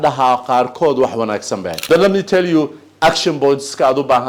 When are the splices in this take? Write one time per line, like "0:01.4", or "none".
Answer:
0:01.9